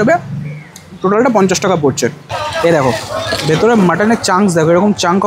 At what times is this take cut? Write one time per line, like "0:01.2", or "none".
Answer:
0:02.2